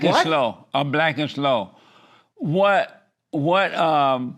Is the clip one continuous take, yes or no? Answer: yes